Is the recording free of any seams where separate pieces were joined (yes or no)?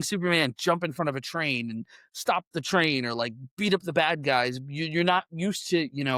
yes